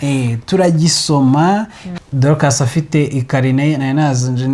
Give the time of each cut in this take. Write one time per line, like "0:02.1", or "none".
0:01.8